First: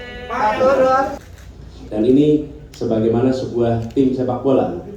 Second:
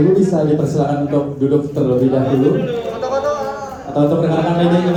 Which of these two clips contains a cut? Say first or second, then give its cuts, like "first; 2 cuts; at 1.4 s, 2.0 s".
first; 1 cut; at 1.1 s